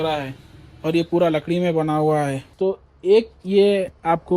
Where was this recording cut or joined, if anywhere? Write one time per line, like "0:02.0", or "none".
0:02.4